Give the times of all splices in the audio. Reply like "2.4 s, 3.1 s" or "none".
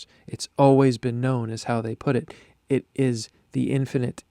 none